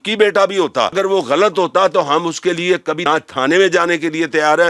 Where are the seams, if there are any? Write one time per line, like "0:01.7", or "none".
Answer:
0:00.9
0:03.1